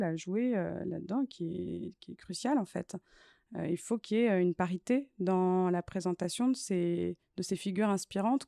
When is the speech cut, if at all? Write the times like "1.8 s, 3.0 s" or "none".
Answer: none

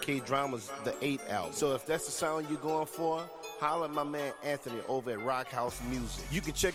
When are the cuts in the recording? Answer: none

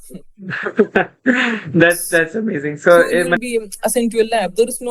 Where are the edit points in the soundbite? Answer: 3.3 s

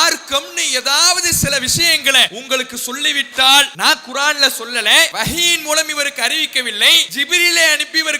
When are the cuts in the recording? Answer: 2.4 s, 3.7 s, 5.1 s, 7.1 s

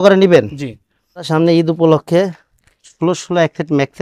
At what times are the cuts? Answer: 1.3 s

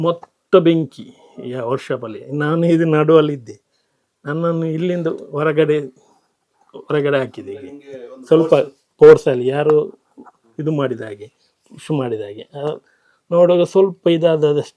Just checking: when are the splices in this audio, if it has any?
none

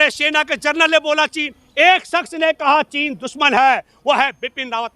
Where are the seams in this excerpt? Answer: none

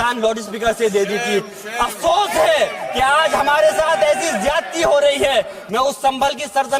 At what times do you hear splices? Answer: 5.6 s

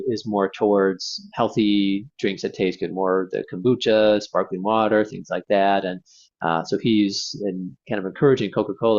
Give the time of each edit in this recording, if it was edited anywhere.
none

